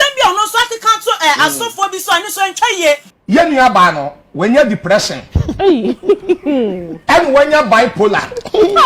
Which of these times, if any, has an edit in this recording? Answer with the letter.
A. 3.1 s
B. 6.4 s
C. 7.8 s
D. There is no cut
A